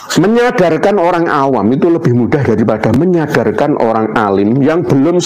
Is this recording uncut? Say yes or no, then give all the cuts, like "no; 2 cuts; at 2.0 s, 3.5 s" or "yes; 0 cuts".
yes; 0 cuts